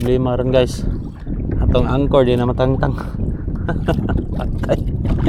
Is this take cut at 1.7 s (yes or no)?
no